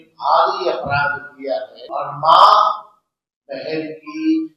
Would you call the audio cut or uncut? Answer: cut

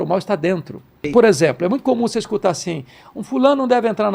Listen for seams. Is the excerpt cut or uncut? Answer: cut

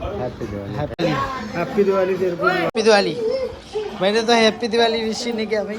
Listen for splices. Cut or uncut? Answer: cut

